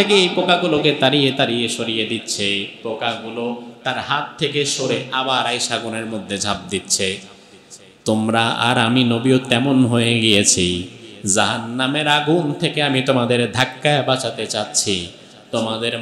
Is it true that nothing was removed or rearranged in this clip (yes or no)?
yes